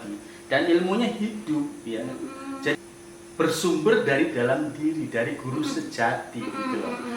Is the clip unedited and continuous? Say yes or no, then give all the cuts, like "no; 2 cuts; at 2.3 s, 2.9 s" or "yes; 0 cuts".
no; 1 cut; at 2.8 s